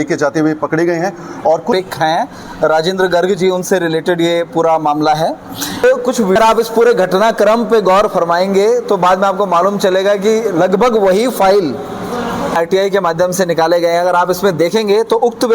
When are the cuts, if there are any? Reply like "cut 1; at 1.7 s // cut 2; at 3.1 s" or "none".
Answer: cut 1; at 1.7 s // cut 2; at 6.4 s // cut 3; at 12.6 s